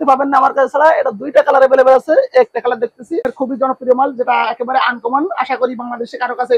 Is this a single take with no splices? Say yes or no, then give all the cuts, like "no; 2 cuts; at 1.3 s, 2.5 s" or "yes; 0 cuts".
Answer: no; 1 cut; at 3.3 s